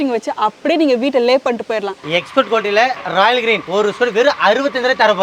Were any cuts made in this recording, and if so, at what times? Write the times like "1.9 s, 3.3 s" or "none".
2.0 s, 3.7 s